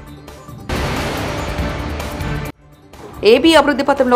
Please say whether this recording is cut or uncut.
cut